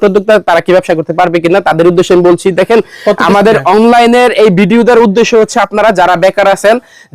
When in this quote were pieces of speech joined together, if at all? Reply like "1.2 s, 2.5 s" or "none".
none